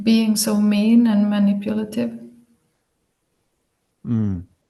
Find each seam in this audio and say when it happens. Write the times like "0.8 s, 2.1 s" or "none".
none

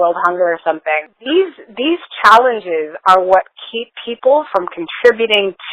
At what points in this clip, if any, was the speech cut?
1.1 s

